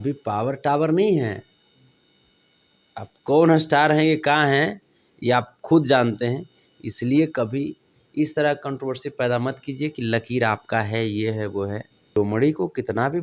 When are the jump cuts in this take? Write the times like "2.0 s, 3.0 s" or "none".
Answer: 12.2 s